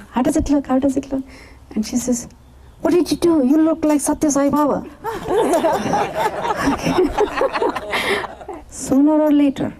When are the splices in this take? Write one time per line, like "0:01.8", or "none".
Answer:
0:08.3